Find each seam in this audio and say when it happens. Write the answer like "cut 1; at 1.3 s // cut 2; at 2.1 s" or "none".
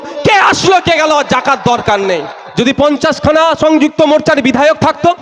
cut 1; at 2.4 s